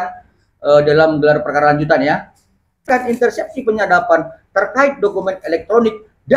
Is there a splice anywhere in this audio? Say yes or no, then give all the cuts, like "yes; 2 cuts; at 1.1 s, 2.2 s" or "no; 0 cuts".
yes; 1 cut; at 2.9 s